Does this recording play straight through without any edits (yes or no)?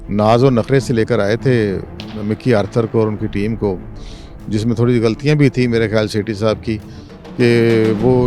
yes